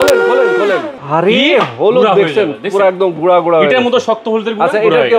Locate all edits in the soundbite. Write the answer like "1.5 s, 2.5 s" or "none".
0.9 s

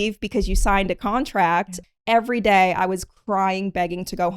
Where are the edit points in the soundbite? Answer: 1.8 s

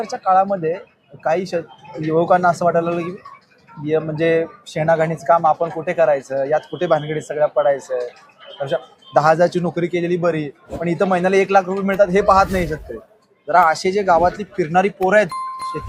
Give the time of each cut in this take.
none

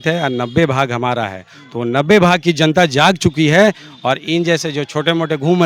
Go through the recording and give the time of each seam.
none

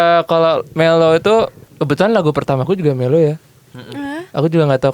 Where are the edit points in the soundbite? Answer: 1.6 s

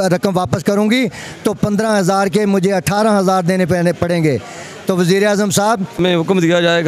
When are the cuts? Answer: 6.0 s

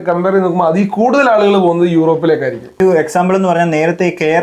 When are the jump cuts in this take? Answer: 2.8 s

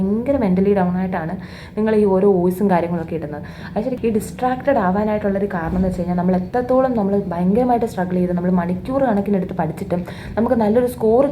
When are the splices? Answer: 4.0 s

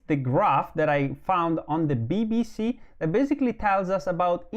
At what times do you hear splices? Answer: none

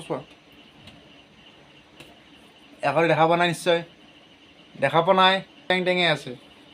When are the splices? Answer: 5.7 s

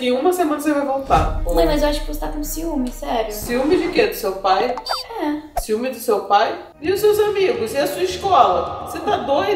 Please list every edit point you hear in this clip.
1.4 s, 6.7 s

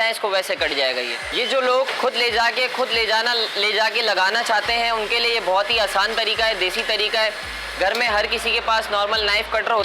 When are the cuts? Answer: none

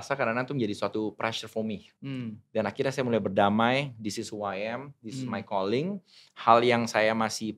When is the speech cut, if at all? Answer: 1.9 s

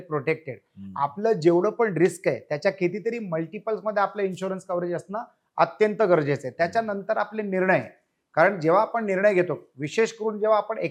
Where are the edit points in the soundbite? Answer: none

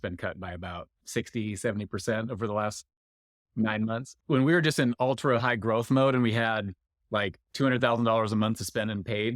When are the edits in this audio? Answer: 0.9 s, 4.1 s

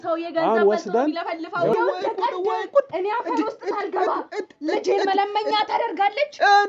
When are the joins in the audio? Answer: 1.7 s

